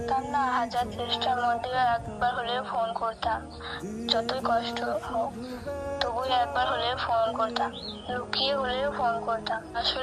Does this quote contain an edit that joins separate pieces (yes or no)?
no